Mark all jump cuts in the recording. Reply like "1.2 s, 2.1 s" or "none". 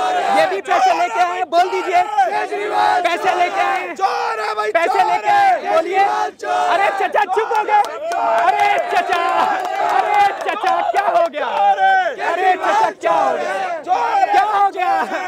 none